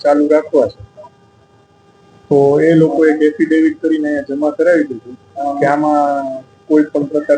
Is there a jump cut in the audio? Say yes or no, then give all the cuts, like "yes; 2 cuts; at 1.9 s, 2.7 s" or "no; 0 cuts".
no; 0 cuts